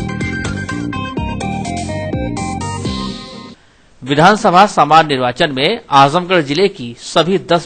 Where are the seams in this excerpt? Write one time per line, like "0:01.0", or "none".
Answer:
0:02.3